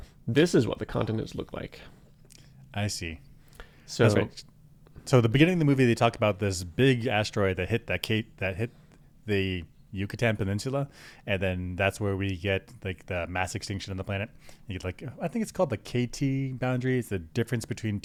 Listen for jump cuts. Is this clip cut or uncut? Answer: uncut